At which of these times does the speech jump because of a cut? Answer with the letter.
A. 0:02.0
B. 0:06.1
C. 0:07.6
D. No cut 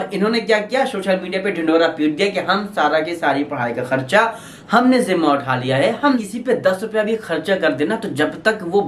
B